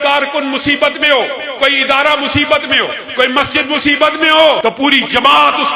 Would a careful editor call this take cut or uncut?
cut